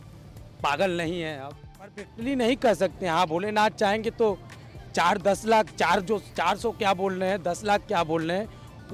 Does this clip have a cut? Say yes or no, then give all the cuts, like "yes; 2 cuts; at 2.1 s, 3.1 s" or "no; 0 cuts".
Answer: yes; 1 cut; at 2.1 s